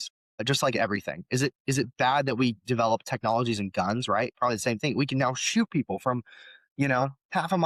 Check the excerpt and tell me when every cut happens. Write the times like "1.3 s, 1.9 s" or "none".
none